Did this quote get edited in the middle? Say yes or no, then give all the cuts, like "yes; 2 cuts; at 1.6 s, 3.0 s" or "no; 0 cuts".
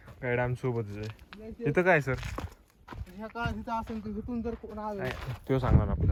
no; 0 cuts